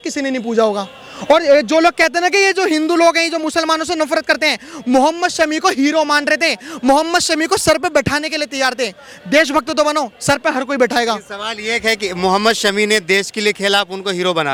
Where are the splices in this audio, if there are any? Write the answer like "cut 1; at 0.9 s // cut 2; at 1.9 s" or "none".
none